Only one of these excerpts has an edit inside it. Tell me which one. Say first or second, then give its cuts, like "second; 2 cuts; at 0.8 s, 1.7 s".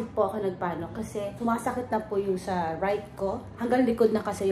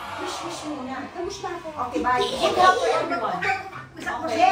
first; 1 cut; at 3.5 s